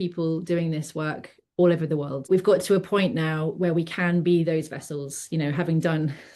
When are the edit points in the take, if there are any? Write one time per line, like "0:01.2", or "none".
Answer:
0:02.3